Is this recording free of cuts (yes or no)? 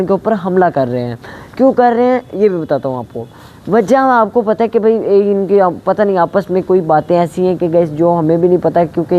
yes